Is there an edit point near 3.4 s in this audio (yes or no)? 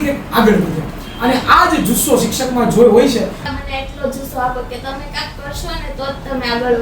yes